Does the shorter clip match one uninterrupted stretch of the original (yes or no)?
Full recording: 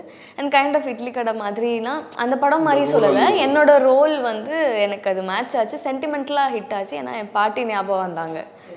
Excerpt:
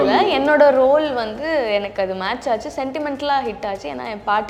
yes